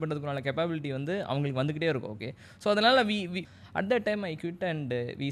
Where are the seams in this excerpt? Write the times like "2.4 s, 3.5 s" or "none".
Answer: 3.4 s